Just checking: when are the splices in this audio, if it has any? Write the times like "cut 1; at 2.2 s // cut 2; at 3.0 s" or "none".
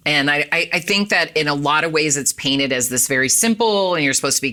none